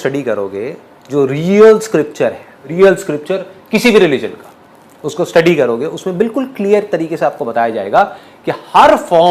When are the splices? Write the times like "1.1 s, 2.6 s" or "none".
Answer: 2.6 s